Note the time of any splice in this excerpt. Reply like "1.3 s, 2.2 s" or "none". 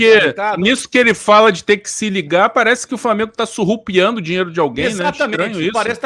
none